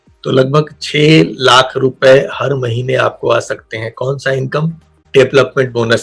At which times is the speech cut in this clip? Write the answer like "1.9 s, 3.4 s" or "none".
5.0 s